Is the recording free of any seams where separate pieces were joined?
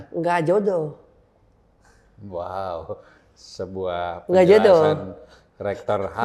yes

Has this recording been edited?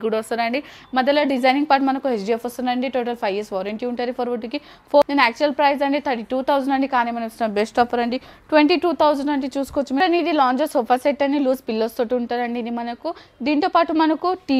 yes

